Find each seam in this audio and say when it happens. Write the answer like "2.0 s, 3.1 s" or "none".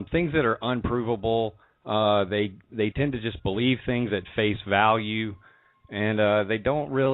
1.6 s